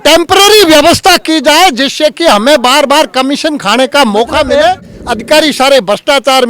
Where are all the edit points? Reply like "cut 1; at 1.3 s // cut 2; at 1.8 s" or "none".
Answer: cut 1; at 4.8 s